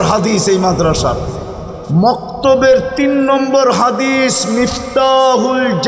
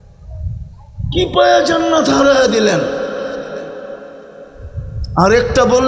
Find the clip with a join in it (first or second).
second